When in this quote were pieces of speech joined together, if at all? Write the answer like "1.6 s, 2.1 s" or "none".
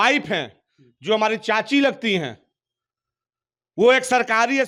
none